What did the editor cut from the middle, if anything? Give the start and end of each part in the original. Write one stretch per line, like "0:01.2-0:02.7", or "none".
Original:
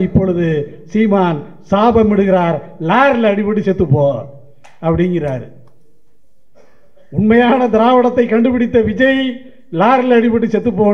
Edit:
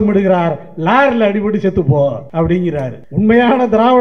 0:04.3-0:04.7
0:05.5-0:07.0